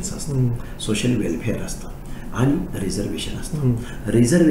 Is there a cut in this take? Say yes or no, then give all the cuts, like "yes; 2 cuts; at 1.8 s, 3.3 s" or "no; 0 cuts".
no; 0 cuts